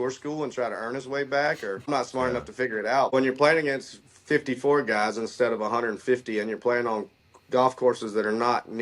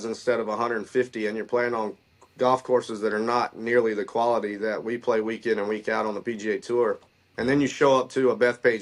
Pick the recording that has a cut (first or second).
first